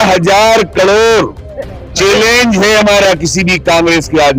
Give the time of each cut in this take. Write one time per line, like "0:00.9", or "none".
none